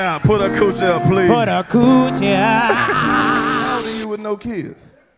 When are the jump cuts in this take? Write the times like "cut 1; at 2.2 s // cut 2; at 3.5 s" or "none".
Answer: cut 1; at 3.8 s